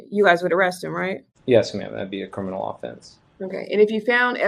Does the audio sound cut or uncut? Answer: cut